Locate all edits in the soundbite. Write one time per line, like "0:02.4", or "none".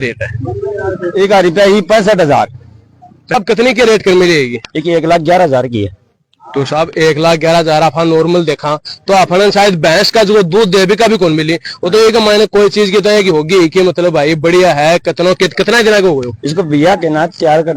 0:03.3